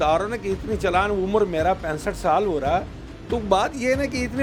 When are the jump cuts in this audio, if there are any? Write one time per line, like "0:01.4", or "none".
none